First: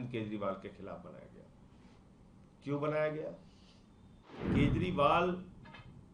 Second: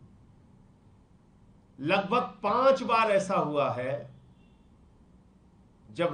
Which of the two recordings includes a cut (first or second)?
first